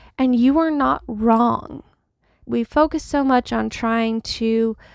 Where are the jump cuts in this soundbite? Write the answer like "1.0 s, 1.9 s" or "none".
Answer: 2.4 s